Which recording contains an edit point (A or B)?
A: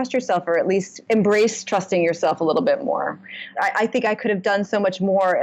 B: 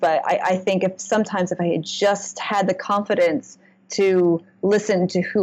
A